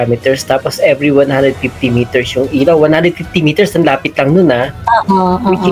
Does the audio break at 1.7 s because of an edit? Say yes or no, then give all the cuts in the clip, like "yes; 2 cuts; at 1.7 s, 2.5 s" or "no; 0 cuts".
no; 0 cuts